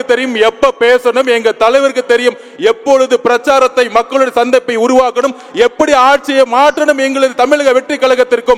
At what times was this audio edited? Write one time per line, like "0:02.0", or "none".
none